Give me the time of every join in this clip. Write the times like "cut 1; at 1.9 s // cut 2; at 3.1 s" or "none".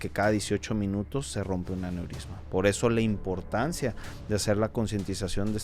none